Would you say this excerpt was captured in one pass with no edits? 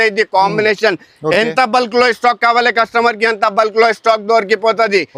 yes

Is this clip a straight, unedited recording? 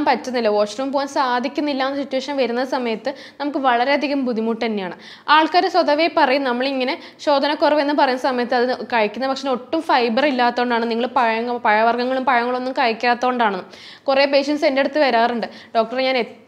yes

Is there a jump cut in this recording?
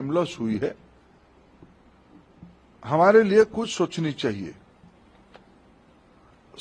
no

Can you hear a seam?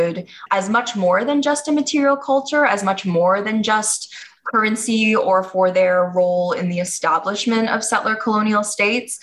no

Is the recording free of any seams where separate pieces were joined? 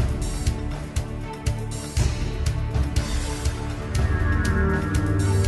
yes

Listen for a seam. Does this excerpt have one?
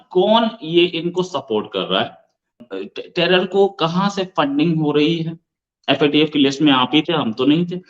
yes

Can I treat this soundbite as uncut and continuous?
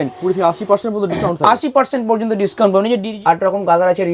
no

